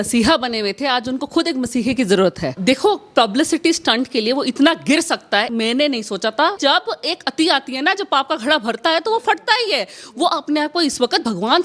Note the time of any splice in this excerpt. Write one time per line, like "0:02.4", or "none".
0:02.5
0:05.5
0:06.6